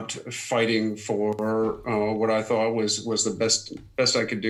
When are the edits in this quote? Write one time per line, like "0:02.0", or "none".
none